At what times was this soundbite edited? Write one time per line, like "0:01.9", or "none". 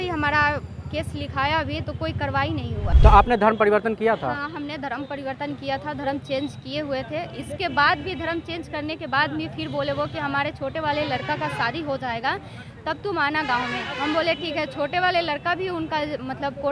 0:02.9